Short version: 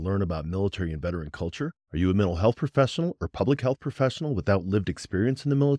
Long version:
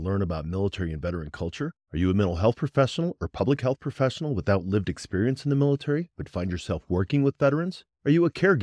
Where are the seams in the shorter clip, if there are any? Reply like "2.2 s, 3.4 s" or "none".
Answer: none

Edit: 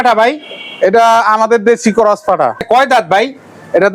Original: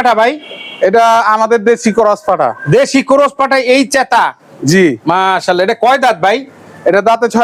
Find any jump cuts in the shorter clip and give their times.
2.6 s

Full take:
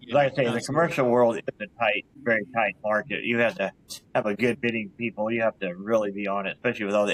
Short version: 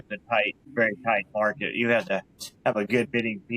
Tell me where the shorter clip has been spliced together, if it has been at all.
none

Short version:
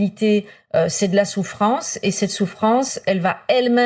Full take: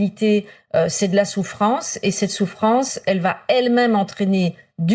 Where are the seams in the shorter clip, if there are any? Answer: none

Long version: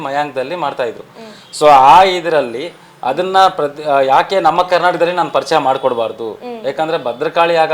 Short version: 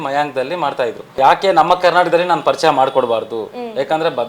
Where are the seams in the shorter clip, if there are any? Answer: 1.2 s

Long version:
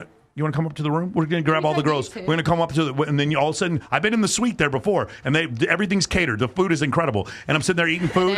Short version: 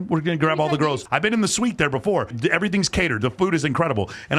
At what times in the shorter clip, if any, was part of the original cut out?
1.0 s, 2.3 s

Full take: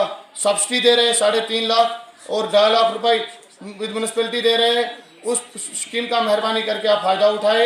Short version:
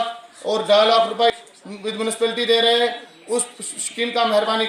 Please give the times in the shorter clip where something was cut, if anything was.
1.5 s

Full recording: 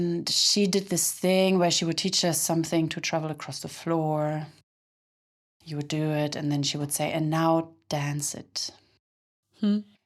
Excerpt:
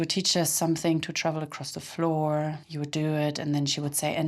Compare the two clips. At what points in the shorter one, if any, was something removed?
2.7 s

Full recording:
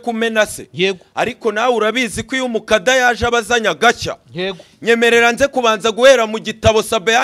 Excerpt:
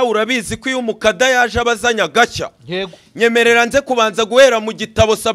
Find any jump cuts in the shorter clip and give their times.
none

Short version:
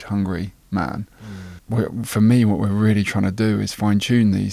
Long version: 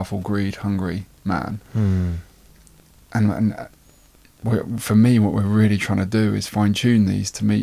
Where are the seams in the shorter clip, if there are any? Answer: 1.1 s

